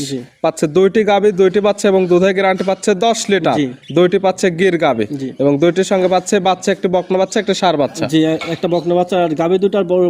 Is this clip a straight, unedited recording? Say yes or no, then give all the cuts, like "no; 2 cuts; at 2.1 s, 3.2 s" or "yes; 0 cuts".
yes; 0 cuts